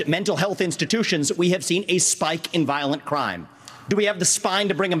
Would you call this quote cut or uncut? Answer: uncut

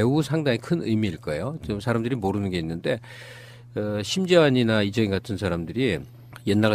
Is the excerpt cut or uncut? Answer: uncut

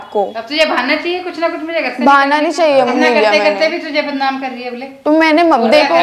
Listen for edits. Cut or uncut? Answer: cut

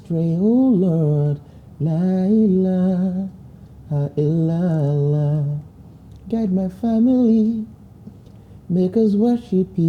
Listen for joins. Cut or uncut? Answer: uncut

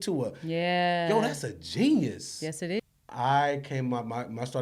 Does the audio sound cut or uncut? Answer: cut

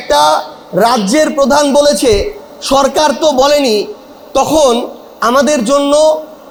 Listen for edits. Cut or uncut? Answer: uncut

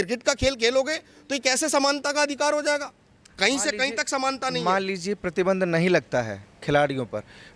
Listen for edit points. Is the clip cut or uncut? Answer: uncut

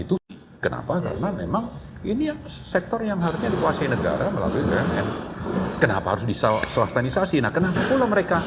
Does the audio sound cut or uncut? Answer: uncut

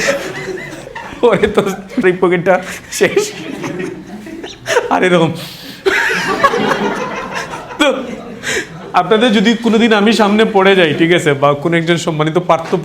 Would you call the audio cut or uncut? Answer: cut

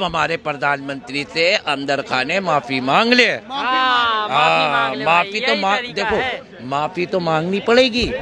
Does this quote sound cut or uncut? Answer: uncut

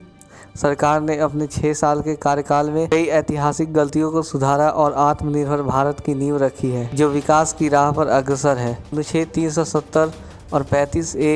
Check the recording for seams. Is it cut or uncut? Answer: cut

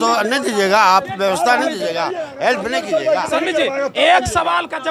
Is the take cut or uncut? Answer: uncut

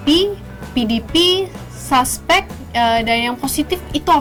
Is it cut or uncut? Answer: uncut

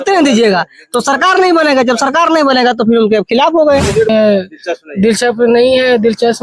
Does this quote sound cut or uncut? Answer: cut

